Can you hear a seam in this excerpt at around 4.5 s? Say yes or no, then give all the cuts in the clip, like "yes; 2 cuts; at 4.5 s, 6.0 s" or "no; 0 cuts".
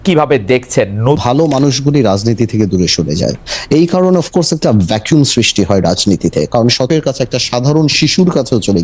no; 2 cuts; at 1.2 s, 6.9 s